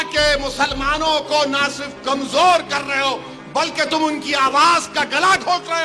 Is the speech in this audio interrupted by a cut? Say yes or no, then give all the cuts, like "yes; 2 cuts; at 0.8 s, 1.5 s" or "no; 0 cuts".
no; 0 cuts